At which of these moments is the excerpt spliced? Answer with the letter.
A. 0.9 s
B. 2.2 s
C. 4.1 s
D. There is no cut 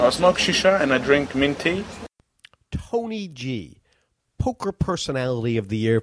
D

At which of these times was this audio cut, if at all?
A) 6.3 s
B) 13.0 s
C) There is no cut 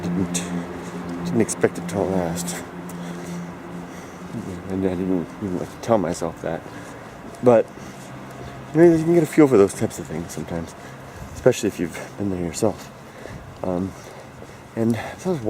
A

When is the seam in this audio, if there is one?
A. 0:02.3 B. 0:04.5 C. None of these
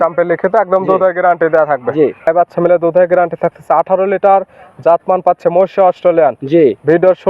A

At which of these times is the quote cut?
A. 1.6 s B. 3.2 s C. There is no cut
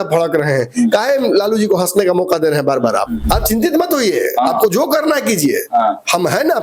B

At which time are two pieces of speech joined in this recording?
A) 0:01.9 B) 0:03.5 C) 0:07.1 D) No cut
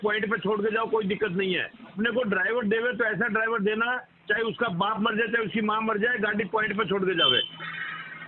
A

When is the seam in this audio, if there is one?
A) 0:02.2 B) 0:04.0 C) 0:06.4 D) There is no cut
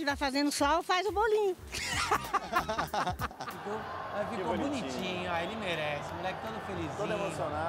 B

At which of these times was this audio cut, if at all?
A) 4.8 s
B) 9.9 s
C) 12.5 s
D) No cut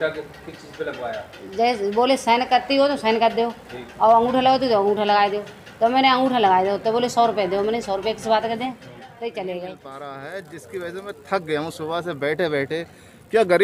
B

